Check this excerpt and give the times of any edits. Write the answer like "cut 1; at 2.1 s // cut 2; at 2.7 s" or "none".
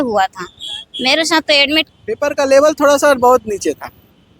cut 1; at 1.9 s